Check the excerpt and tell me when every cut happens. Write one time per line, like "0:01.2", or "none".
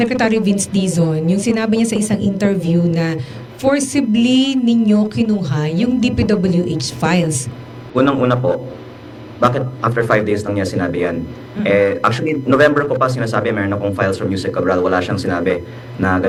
none